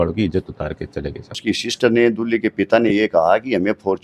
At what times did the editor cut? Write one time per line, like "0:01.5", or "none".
0:01.4